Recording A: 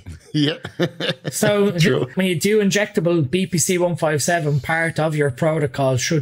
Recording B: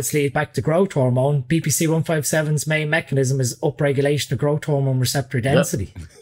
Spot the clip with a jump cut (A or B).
A